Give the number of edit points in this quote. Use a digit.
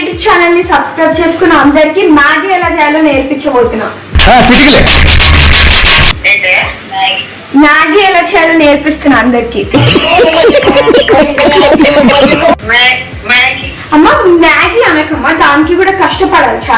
0